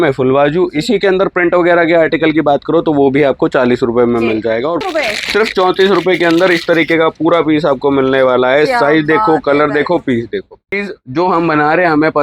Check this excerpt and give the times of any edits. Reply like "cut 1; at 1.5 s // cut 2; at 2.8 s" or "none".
cut 1; at 4.8 s // cut 2; at 10.8 s